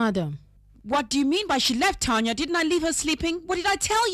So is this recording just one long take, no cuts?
no; 1 cut; at 1.1 s

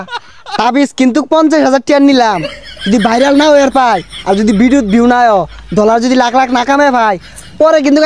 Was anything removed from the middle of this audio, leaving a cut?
no; 0 cuts

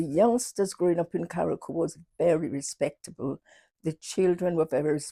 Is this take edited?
no; 0 cuts

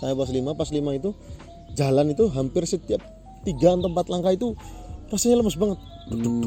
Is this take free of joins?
yes; 0 cuts

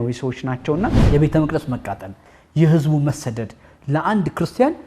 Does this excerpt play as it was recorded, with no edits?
no; 1 cut; at 1.0 s

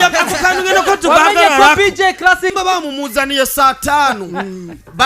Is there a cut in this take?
yes; 1 cut; at 2.5 s

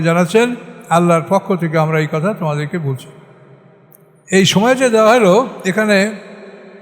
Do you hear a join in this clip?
yes; 1 cut; at 4.2 s

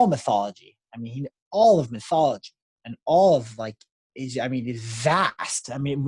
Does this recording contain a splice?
no; 0 cuts

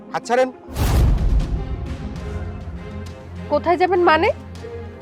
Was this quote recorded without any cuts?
yes; 0 cuts

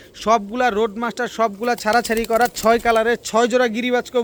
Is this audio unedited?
yes; 0 cuts

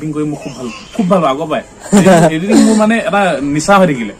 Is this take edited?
no; 0 cuts

